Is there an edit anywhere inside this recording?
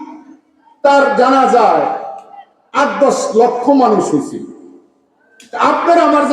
no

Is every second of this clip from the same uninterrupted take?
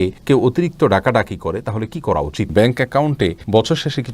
no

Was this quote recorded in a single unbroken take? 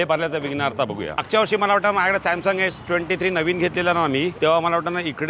no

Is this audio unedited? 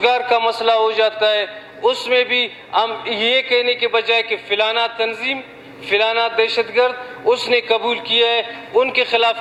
yes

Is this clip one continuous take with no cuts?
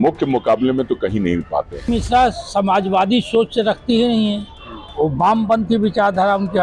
no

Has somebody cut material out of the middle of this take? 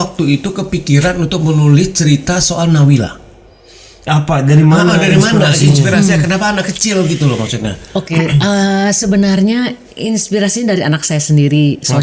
no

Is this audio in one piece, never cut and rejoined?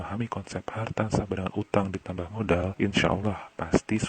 no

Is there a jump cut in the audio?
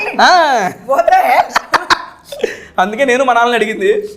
no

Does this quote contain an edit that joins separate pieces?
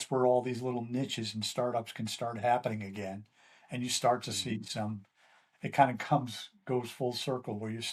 no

